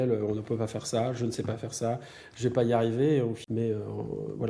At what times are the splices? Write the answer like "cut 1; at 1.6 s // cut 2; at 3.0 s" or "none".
cut 1; at 3.4 s